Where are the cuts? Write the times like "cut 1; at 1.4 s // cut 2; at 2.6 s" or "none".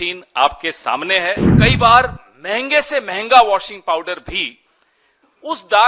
cut 1; at 1.5 s